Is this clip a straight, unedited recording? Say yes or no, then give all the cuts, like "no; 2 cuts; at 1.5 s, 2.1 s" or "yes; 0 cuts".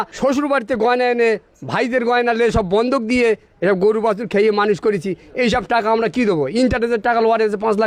yes; 0 cuts